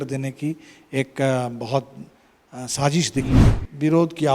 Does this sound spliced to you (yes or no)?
yes